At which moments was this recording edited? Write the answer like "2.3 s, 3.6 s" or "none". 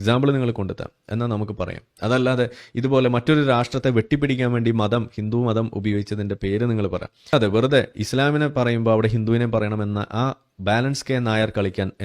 7.3 s